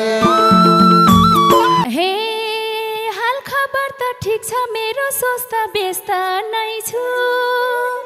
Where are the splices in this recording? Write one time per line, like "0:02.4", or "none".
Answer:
0:01.8